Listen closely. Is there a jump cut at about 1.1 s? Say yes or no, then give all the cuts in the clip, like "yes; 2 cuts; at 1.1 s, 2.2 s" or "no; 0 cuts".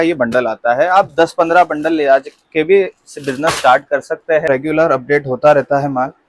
no; 1 cut; at 4.5 s